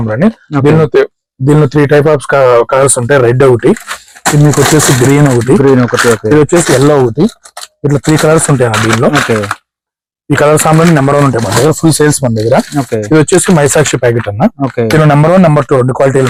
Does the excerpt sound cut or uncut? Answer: uncut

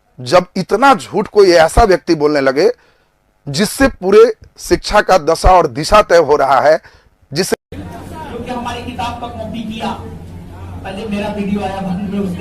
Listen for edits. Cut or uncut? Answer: cut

